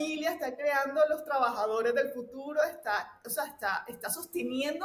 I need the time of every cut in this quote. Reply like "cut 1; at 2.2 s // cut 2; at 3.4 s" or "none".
none